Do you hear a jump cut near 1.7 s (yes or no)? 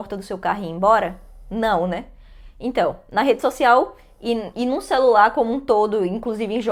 no